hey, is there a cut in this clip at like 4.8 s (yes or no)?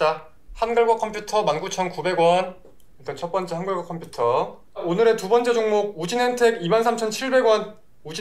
yes